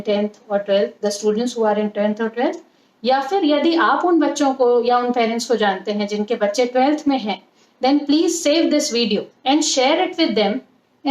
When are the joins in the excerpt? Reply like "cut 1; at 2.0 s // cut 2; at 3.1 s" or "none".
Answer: cut 1; at 9.3 s

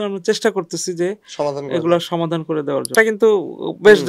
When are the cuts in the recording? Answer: cut 1; at 2.9 s

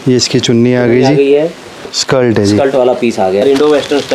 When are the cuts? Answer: cut 1; at 1.8 s // cut 2; at 3.4 s

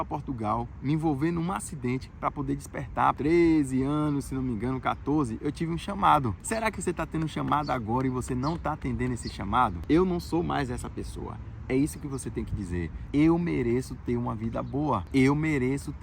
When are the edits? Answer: cut 1; at 3.2 s // cut 2; at 6.4 s // cut 3; at 9.8 s // cut 4; at 13.0 s

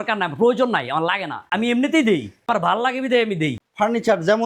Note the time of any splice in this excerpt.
cut 1; at 1.4 s // cut 2; at 2.5 s // cut 3; at 3.6 s

